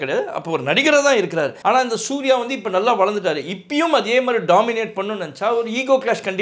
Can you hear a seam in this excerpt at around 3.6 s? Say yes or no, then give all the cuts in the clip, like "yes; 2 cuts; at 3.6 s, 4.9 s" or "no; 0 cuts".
no; 1 cut; at 1.6 s